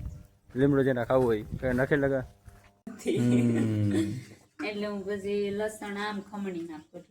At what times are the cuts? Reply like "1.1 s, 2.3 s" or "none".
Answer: 2.8 s